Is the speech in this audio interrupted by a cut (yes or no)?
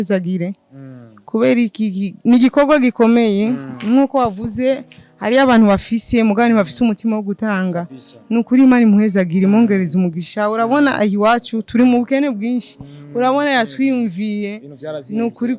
no